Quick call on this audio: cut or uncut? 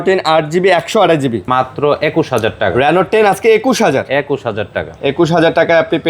cut